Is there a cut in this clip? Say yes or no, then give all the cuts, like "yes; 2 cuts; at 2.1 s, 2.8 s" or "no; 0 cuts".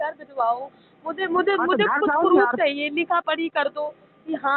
no; 0 cuts